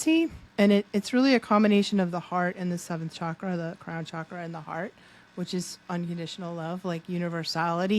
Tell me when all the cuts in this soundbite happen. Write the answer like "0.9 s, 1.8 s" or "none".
none